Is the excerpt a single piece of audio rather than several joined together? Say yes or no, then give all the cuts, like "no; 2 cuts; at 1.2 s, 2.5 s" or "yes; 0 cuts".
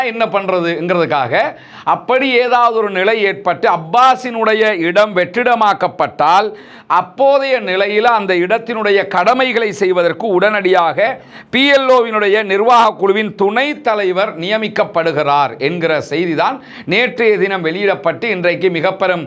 yes; 0 cuts